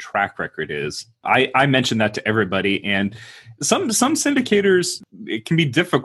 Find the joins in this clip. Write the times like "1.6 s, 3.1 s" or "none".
1.2 s, 5.0 s